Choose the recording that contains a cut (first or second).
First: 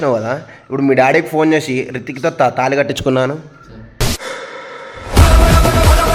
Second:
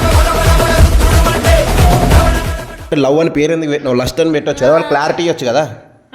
second